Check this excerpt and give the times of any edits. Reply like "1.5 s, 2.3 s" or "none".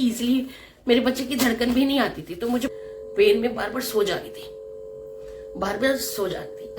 2.7 s